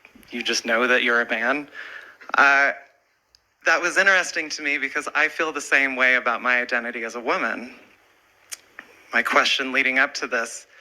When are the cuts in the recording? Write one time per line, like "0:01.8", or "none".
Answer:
0:05.9